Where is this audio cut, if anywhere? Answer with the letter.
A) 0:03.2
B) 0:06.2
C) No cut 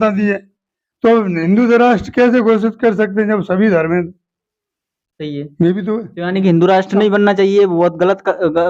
B